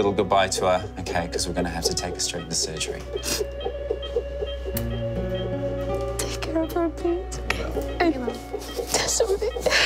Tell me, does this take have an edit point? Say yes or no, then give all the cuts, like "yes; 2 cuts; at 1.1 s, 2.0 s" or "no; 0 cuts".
no; 0 cuts